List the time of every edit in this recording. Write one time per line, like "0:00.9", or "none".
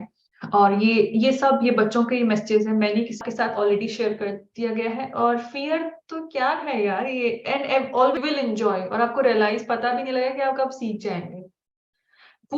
0:03.2
0:08.2